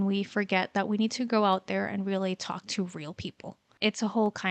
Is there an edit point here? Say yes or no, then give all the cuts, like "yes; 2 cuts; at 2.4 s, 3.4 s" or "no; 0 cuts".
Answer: no; 0 cuts